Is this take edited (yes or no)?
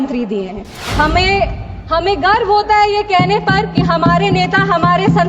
no